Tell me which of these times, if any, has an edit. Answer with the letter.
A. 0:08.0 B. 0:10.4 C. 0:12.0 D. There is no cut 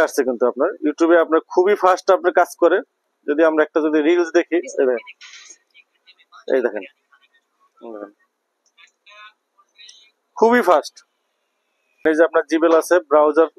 C